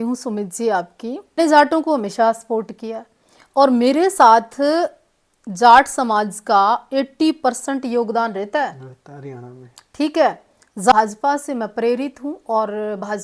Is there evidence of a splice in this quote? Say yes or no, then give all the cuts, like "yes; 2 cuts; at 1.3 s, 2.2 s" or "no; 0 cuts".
yes; 2 cuts; at 1.4 s, 10.9 s